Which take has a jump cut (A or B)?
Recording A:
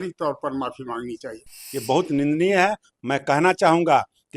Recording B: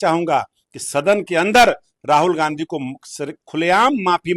A